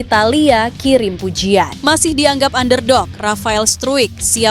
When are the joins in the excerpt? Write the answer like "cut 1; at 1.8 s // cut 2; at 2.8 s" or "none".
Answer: cut 1; at 1.7 s